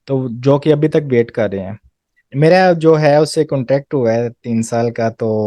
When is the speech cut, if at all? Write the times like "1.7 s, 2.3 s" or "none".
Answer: 2.3 s